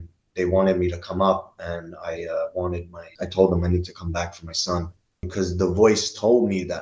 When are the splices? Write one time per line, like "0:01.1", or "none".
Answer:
0:03.1
0:05.3